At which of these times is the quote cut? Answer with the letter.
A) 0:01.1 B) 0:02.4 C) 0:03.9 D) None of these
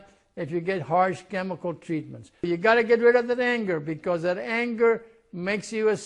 B